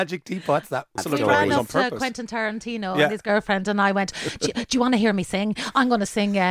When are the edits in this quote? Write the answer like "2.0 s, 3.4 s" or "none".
1.0 s